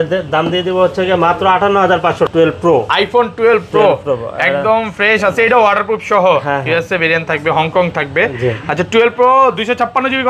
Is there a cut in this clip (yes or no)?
yes